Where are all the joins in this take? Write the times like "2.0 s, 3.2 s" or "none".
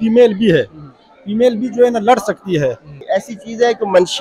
3.0 s